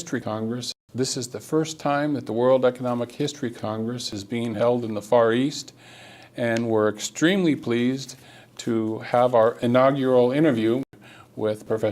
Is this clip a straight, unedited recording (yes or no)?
no